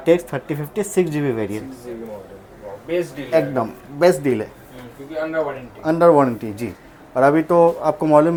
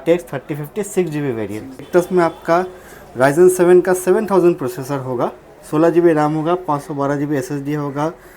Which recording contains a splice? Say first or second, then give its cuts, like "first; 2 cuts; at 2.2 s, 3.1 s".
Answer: second; 1 cut; at 1.9 s